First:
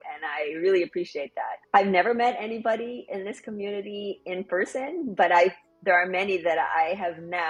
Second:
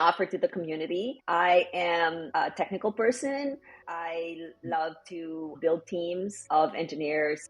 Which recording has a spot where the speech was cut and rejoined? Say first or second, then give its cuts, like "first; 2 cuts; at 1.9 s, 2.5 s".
second; 5 cuts; at 1.2 s, 2.2 s, 3.8 s, 5.5 s, 6.4 s